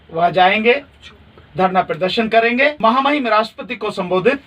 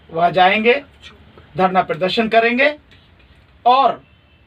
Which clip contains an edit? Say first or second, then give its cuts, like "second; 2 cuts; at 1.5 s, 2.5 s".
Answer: first; 1 cut; at 2.8 s